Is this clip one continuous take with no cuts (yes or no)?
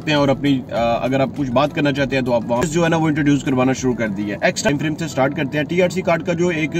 no